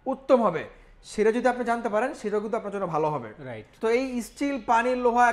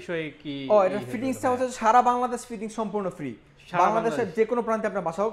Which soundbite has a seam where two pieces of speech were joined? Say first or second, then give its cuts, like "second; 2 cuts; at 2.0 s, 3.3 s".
first; 1 cut; at 3.6 s